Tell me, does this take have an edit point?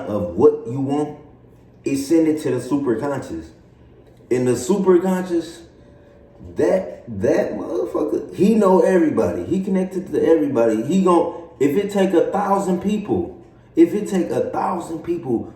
no; 0 cuts

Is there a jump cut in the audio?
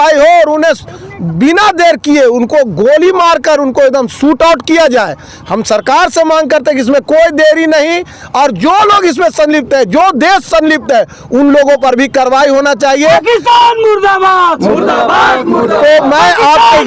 no; 0 cuts

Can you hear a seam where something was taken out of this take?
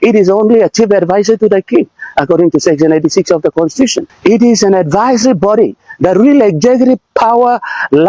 yes; 1 cut; at 4.1 s

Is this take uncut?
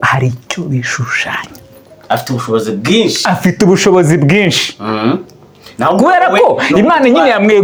yes; 0 cuts

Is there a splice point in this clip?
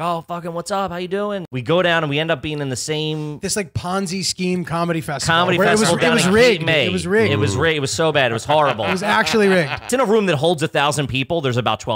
yes; 2 cuts; at 1.5 s, 9.8 s

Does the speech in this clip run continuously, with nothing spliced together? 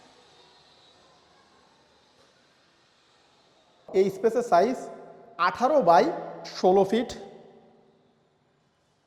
no; 1 cut; at 3.8 s

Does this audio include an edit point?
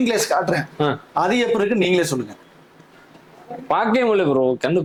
no; 0 cuts

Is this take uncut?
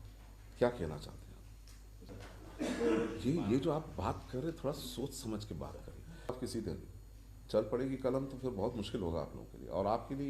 no; 2 cuts; at 2.0 s, 6.4 s

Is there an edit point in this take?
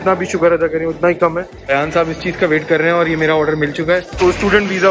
yes; 2 cuts; at 1.5 s, 4.1 s

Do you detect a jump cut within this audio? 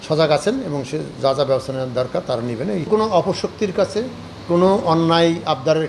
yes; 1 cut; at 2.9 s

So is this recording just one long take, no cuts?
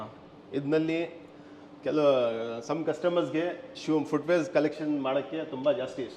yes; 0 cuts

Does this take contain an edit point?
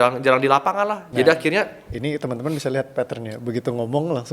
yes; 1 cut; at 1.1 s

